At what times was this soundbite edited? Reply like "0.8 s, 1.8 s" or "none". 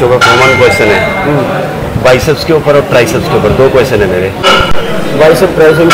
4.4 s